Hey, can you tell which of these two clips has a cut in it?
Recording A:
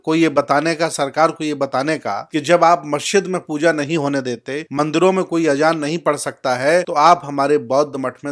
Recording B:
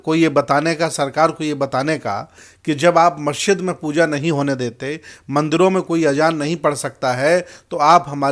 A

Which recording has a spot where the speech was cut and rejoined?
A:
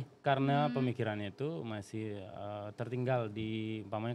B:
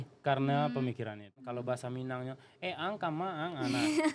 B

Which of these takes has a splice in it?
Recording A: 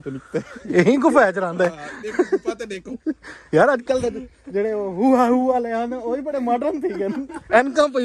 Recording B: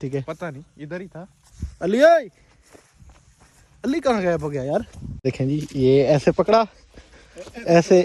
B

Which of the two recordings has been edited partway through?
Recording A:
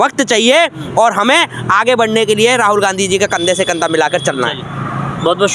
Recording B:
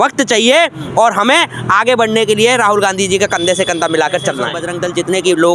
B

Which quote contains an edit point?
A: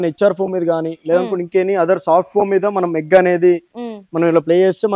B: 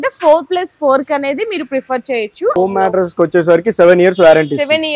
B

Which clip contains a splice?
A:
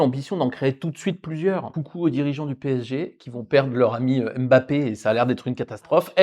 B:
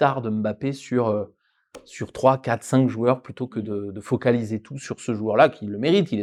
A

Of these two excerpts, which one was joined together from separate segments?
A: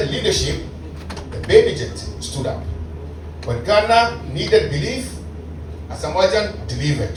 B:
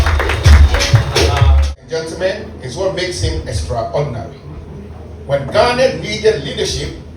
B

